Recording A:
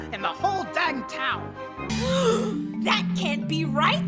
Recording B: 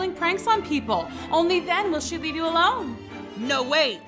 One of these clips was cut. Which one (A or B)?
A